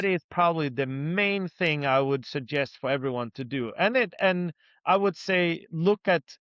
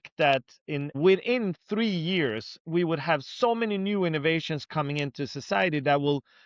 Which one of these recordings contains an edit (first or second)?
second